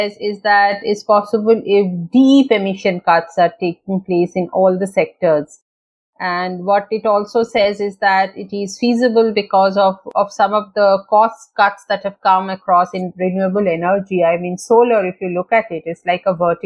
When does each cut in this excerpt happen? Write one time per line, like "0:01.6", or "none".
none